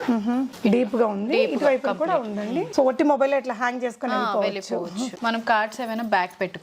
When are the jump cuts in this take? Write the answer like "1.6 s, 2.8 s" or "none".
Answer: 2.7 s, 5.2 s